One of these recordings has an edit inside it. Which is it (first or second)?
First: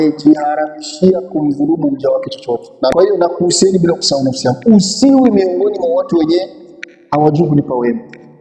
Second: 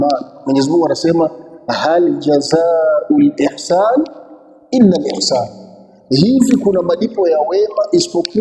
first